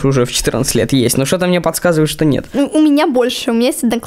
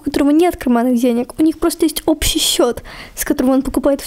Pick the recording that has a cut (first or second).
first